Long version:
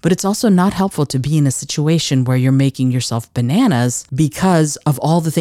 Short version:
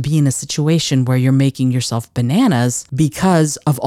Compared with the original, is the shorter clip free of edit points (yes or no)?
yes